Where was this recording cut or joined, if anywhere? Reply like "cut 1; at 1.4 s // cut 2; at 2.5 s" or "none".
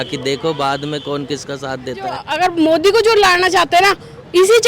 cut 1; at 2.3 s